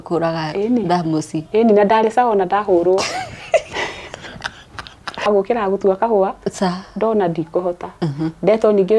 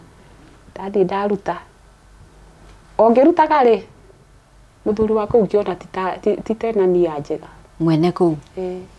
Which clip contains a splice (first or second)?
first